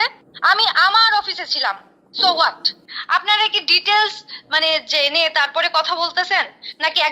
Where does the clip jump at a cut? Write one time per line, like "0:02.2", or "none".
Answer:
0:02.7